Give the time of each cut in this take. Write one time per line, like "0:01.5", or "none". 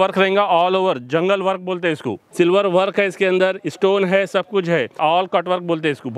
0:02.2
0:04.9